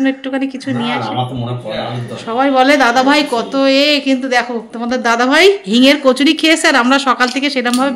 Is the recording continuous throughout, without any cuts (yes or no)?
yes